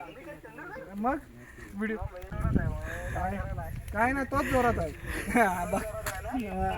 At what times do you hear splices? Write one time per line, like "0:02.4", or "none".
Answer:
0:02.3